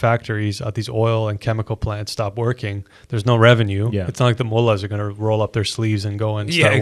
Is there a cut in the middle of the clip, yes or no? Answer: no